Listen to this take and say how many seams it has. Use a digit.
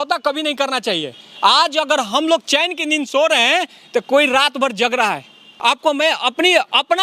1